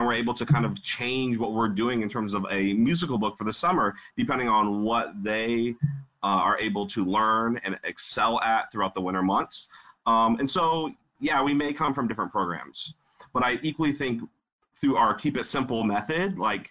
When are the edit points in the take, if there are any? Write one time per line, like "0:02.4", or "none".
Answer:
none